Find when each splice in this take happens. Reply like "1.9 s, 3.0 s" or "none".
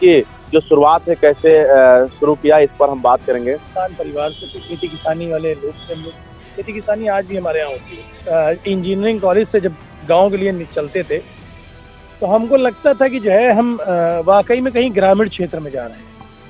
3.7 s, 8.1 s

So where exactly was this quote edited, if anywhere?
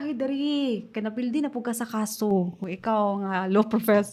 none

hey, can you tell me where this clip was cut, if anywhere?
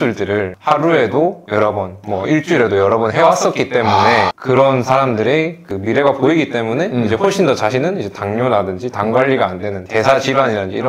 none

